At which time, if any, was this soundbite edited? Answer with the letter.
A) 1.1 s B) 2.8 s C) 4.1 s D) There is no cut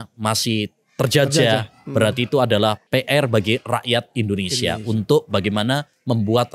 B